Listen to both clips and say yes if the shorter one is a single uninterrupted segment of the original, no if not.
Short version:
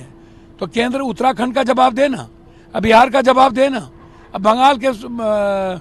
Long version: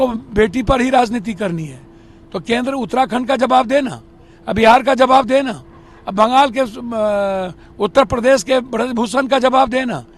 yes